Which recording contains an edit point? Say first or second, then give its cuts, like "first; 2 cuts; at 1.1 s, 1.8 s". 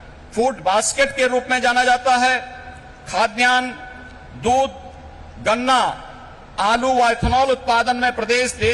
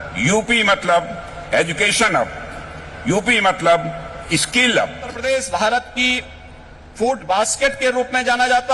second; 1 cut; at 5.1 s